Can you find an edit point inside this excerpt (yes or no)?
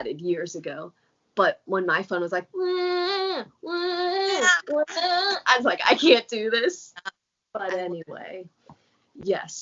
yes